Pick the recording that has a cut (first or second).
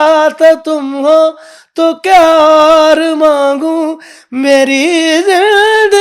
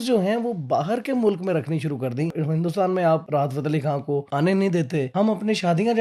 second